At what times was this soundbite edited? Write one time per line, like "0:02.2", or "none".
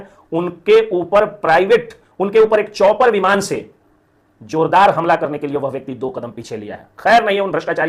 none